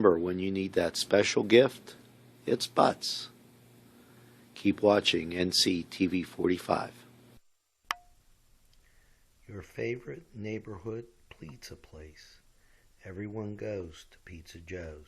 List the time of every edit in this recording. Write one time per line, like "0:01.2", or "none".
0:07.4